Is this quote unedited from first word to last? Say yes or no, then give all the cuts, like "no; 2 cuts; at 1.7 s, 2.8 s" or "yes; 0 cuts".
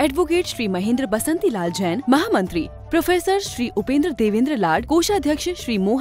yes; 0 cuts